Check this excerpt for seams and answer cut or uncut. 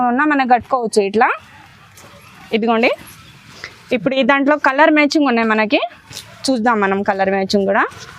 uncut